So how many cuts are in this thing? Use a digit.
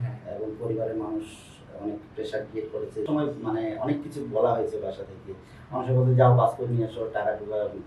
1